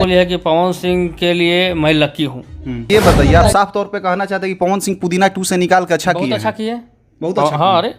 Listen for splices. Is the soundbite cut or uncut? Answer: cut